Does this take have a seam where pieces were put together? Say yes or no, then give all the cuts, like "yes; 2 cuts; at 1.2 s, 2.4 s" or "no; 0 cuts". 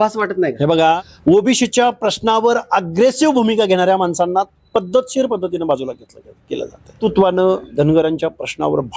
yes; 2 cuts; at 1.1 s, 7.0 s